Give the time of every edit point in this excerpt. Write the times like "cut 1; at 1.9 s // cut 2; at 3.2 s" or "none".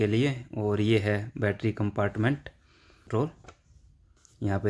cut 1; at 3.1 s